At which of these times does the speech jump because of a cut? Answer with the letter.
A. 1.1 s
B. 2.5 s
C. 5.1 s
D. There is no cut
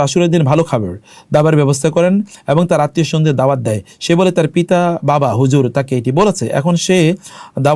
D